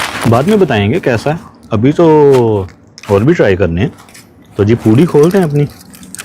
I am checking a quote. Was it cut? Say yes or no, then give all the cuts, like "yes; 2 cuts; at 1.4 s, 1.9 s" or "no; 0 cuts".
no; 0 cuts